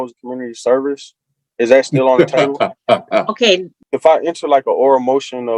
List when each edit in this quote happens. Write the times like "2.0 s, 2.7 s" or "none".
3.7 s